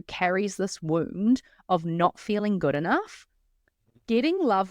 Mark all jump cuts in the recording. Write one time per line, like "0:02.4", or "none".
none